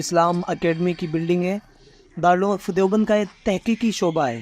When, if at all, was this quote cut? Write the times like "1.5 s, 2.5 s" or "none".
none